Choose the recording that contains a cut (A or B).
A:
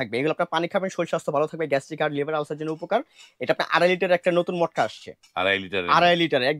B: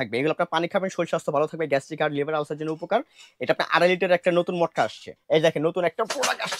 B